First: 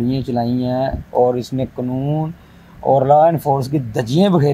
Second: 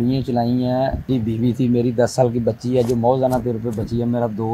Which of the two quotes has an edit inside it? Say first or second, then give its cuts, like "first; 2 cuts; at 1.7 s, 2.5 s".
second; 1 cut; at 1.1 s